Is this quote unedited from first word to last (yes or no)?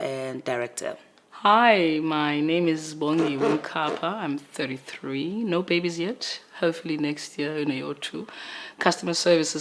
yes